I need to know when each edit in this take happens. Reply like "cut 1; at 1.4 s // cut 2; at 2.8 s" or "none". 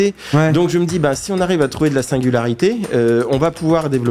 none